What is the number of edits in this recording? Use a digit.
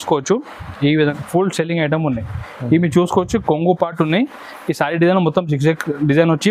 1